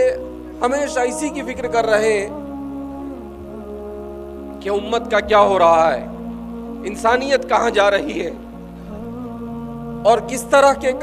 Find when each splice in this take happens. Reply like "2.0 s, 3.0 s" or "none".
8.3 s, 9.7 s